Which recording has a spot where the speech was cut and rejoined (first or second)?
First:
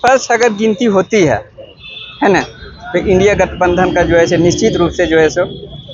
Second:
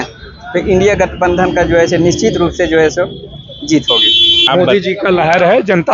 second